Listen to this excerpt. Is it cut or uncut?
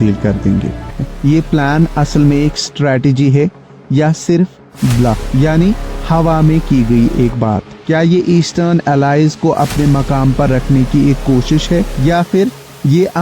cut